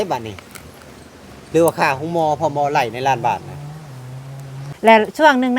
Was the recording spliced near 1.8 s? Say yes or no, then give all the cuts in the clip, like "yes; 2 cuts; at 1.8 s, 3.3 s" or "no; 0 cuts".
no; 1 cut; at 4.7 s